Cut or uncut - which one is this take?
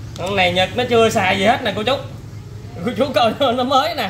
uncut